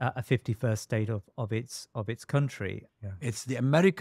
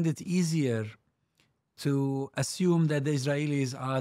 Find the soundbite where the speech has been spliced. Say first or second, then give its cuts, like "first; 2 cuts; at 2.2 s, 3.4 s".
first; 1 cut; at 2.8 s